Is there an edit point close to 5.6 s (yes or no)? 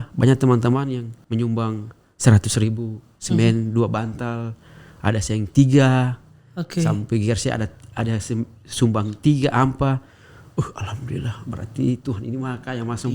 no